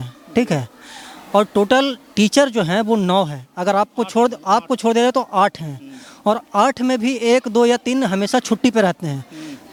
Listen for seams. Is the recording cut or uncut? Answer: uncut